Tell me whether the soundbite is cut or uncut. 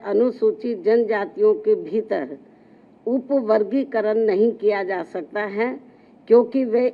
uncut